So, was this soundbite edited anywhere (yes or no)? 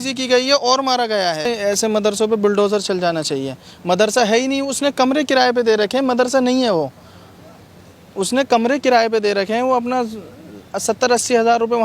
yes